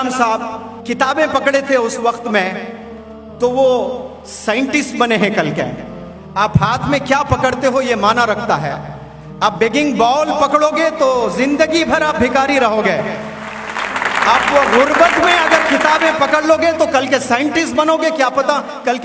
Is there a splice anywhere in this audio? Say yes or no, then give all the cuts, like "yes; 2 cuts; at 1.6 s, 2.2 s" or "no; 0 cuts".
no; 0 cuts